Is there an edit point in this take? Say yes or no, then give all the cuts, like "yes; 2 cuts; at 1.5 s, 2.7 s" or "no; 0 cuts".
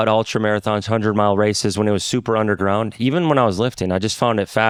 no; 0 cuts